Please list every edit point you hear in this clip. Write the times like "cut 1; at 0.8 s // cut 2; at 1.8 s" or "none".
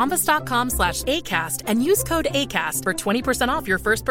none